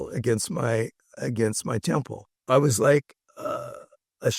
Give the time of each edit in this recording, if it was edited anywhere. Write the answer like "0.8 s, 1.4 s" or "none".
2.4 s